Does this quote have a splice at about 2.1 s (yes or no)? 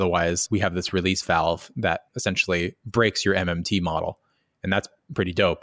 yes